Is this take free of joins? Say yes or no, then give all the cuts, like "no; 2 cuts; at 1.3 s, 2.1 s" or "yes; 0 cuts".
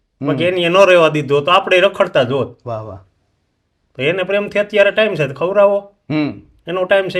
yes; 0 cuts